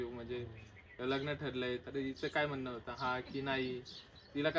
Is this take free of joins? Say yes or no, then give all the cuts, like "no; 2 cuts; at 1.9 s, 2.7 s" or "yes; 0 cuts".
yes; 0 cuts